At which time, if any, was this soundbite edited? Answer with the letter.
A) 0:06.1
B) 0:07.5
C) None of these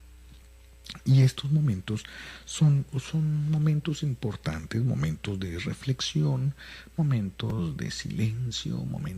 B